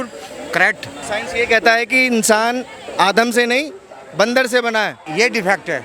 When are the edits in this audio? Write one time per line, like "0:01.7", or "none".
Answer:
0:01.0
0:05.0